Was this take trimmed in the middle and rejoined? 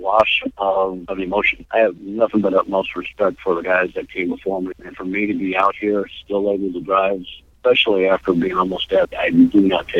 yes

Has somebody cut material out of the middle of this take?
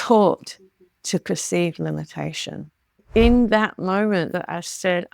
yes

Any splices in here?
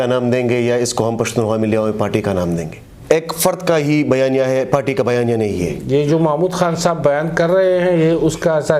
yes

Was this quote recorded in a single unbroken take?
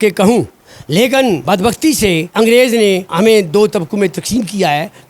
no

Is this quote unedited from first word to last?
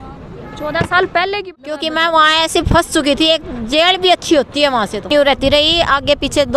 no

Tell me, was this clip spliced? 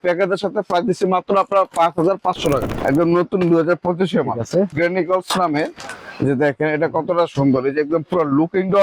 yes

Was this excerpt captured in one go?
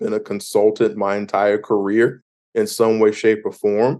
yes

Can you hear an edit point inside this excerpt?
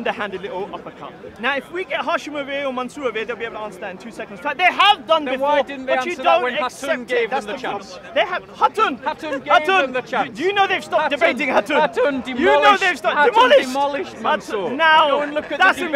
no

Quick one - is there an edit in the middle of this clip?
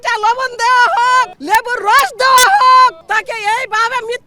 yes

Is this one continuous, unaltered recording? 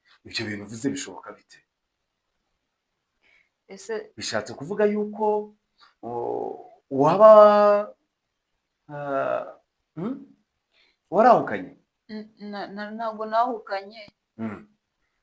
yes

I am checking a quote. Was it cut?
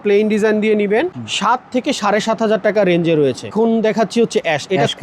yes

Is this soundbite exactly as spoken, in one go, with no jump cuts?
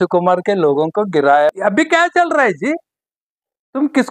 no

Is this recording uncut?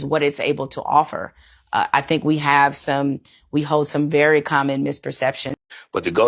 yes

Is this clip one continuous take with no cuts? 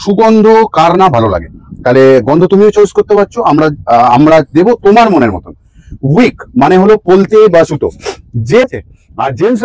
no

